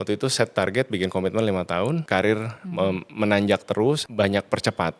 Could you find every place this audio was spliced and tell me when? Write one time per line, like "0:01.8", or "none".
0:02.0
0:04.0